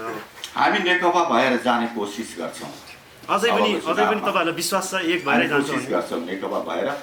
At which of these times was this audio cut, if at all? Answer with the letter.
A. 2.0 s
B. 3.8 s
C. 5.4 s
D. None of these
D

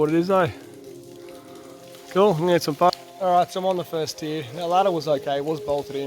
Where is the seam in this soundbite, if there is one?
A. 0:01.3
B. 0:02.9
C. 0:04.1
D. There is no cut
B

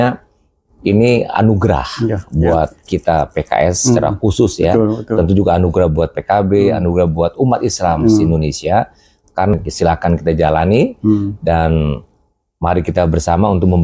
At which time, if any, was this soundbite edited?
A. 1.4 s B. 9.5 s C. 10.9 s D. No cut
B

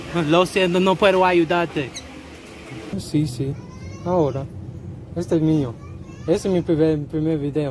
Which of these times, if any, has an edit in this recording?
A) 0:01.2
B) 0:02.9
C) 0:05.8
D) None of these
B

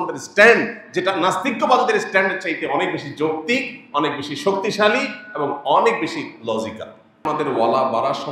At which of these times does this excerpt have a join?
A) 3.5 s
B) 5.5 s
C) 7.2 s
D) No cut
C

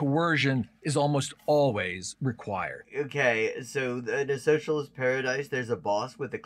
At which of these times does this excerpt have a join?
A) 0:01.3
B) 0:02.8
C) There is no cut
B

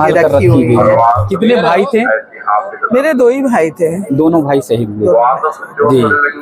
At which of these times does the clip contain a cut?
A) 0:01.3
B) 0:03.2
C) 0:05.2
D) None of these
A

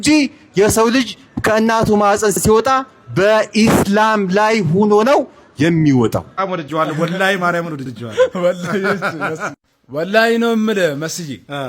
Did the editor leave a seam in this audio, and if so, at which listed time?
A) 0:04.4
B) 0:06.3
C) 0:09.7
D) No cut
B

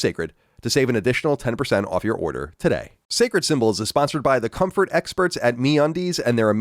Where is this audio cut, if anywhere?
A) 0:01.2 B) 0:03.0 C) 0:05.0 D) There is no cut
B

